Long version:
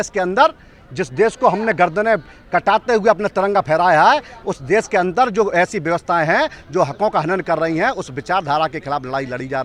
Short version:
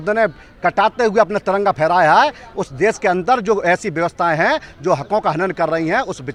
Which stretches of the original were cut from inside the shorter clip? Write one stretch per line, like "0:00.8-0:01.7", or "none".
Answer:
none